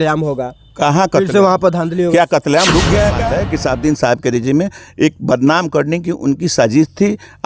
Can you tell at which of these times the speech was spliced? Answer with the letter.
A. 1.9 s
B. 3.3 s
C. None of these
B